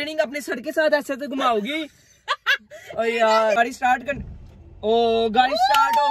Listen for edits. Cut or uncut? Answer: cut